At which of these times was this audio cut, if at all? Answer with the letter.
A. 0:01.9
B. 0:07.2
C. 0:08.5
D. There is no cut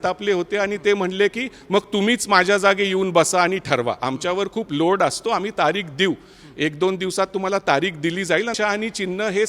C